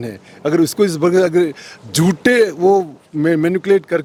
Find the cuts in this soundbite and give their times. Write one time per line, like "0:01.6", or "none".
none